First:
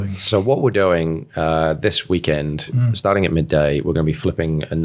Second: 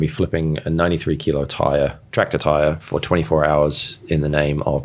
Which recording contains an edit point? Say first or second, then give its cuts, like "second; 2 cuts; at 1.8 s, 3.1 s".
first; 1 cut; at 2.8 s